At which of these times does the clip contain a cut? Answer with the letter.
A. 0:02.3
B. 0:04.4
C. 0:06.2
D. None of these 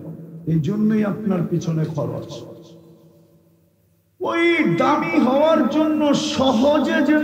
D